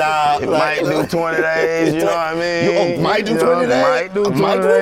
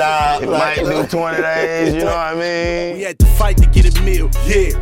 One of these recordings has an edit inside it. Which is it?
second; 1 cut; at 2.8 s

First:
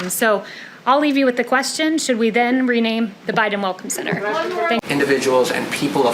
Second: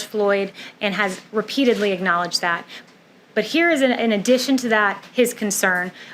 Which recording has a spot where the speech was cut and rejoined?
first; 1 cut; at 4.8 s

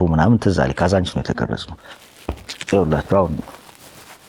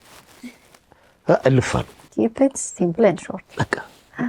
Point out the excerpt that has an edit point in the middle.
second; 1 cut; at 2.0 s

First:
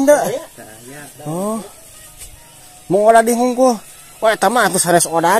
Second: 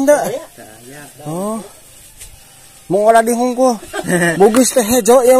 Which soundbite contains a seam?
second; 1 cut; at 3.9 s

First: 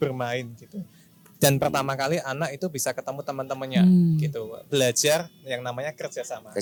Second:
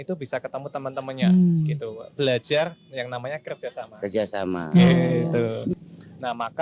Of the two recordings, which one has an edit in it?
second; 1 cut; at 5.7 s

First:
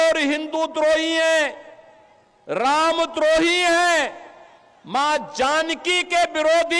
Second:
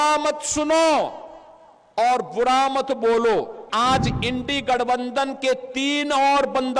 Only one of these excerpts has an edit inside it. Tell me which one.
second; 1 cut; at 3.6 s

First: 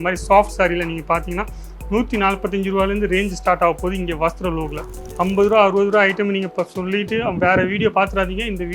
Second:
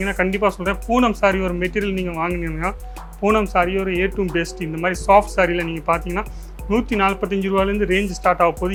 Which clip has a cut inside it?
first; 1 cut; at 5.0 s

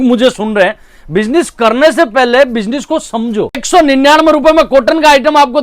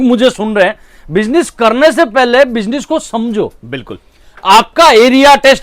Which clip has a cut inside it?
first; 1 cut; at 3.6 s

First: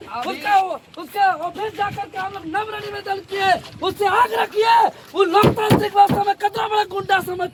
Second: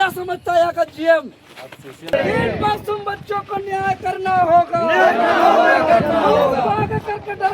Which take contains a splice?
second; 1 cut; at 2.1 s

